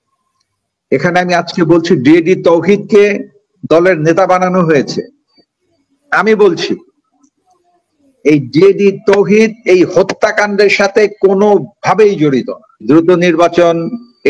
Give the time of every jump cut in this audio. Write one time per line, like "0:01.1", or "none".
0:12.8